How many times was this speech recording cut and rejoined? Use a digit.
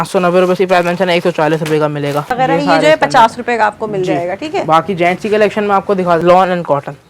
2